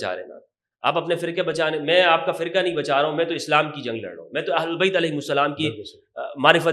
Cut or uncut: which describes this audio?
uncut